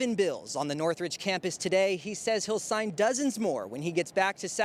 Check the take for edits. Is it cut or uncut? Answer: uncut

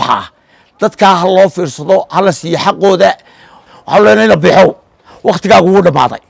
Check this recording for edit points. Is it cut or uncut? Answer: cut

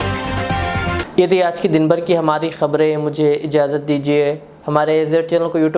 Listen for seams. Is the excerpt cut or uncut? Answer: uncut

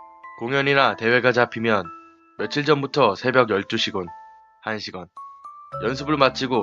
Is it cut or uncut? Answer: cut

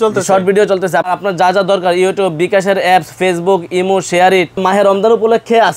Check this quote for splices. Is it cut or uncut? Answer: cut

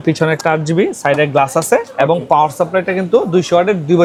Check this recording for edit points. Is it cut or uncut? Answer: uncut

